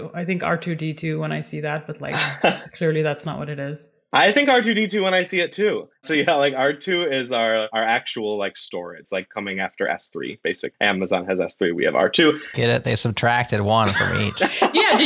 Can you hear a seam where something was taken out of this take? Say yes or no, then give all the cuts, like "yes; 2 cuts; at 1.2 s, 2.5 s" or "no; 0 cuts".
yes; 3 cuts; at 7.7 s, 9.0 s, 10.7 s